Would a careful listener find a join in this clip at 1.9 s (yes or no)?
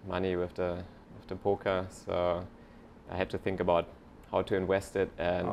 no